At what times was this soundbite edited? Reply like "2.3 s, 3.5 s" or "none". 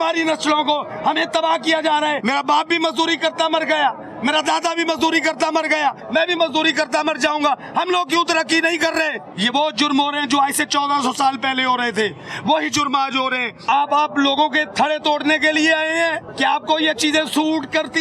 2.2 s, 6.0 s, 9.2 s, 13.7 s, 16.3 s